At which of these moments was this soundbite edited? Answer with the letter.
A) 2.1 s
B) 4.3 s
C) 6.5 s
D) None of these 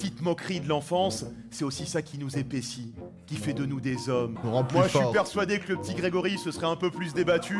B